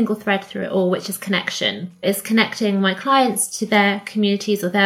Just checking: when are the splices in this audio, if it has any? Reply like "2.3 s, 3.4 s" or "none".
2.0 s

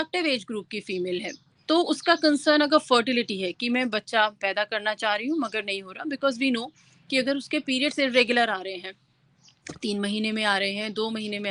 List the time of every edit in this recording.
none

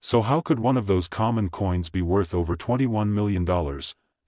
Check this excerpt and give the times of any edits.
1.5 s

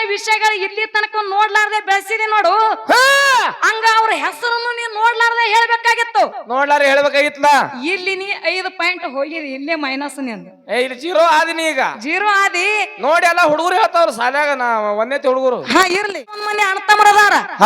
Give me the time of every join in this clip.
16.4 s

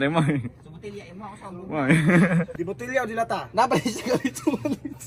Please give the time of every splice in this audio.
2.5 s

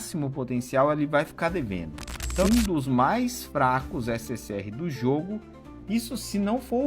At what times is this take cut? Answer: 2.4 s

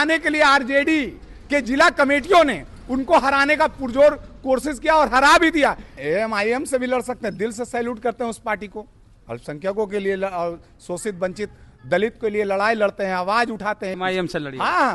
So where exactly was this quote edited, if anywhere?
5.9 s, 13.9 s

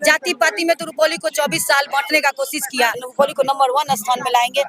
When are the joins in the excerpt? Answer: 3.1 s

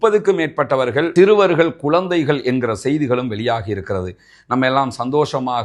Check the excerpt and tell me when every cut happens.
none

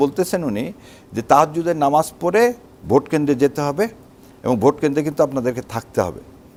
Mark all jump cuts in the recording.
none

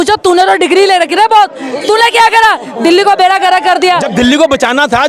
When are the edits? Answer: 4.1 s

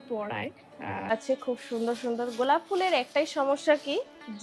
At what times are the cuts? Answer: 1.1 s

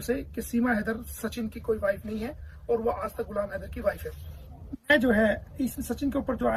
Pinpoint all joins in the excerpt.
none

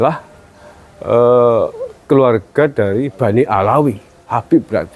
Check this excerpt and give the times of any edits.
none

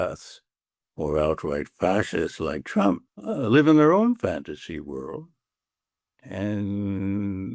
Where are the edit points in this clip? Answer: 3.1 s

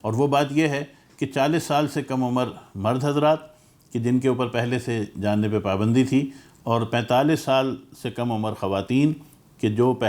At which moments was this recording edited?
none

